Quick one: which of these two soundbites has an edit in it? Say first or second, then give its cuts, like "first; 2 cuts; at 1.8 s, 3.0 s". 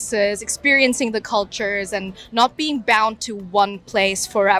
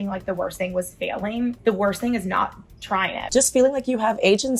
second; 2 cuts; at 1.6 s, 3.2 s